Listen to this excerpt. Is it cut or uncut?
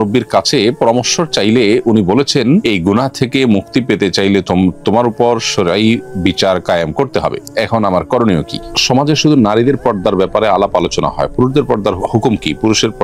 cut